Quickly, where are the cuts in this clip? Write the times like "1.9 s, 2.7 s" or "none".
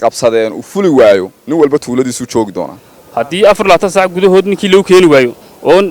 2.8 s